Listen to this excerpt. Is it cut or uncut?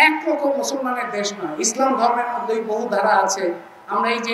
uncut